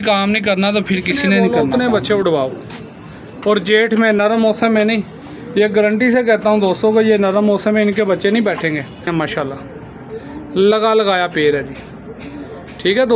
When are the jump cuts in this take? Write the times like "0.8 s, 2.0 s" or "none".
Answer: 1.6 s, 9.1 s